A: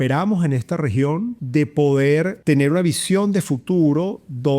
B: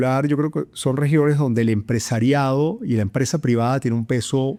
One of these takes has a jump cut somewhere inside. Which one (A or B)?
A